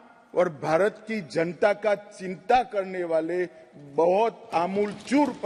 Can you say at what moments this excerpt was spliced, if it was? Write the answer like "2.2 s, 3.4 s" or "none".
none